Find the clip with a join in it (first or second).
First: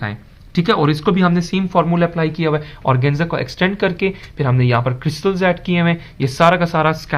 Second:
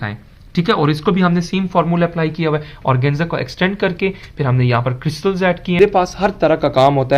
second